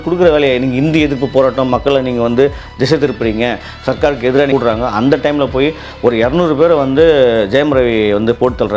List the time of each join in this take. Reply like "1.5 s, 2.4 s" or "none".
4.5 s